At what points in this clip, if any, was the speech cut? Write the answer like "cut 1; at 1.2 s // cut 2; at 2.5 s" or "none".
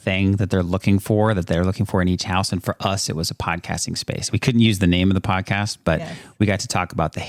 none